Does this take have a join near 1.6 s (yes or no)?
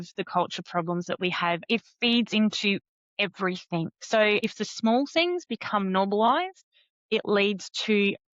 yes